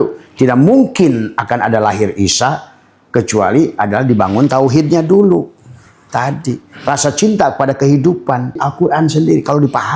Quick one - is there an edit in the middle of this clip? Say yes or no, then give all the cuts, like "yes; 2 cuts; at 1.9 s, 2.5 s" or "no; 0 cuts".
yes; 1 cut; at 8.7 s